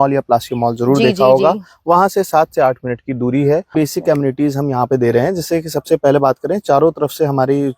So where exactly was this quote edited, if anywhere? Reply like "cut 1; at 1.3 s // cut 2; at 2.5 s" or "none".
cut 1; at 3.7 s

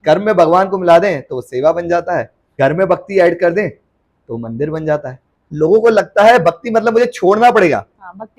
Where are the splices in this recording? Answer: cut 1; at 2.4 s // cut 2; at 5.5 s

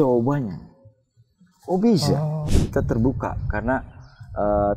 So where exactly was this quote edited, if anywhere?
cut 1; at 2.5 s

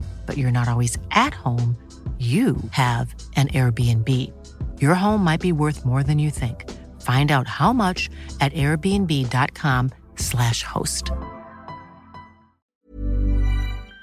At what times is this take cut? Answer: cut 1; at 12.7 s

